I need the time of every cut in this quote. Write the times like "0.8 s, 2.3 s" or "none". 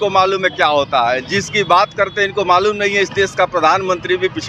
none